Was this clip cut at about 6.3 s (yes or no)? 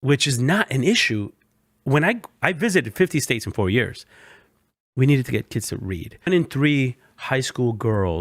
yes